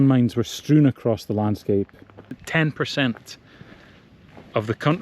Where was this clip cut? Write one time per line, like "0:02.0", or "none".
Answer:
0:02.4